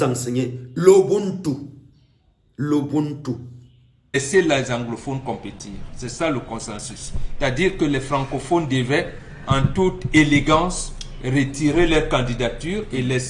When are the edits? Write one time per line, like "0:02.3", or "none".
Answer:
0:04.2